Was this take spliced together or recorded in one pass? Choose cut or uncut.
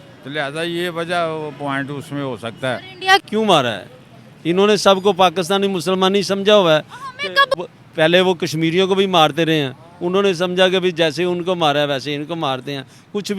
cut